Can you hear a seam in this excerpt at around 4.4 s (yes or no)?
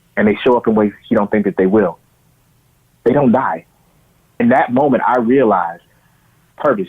yes